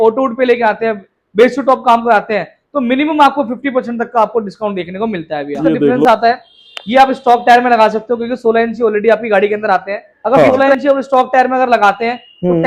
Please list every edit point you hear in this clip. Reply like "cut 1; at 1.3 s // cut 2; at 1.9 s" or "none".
cut 1; at 6.0 s // cut 2; at 10.5 s